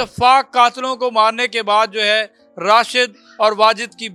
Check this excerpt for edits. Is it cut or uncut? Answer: uncut